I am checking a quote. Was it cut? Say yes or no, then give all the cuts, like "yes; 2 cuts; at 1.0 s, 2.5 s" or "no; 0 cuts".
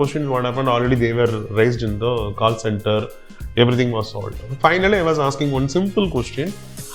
no; 0 cuts